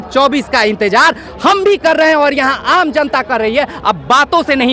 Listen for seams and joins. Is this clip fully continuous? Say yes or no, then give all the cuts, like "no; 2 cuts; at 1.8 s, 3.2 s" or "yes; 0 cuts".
yes; 0 cuts